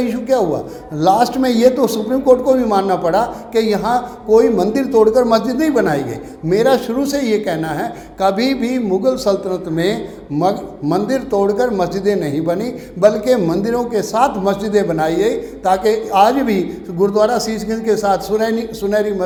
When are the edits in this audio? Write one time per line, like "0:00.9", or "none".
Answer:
none